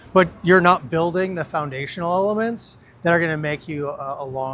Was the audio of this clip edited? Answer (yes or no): no